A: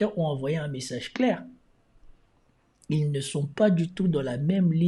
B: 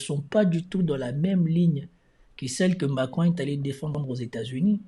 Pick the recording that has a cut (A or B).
B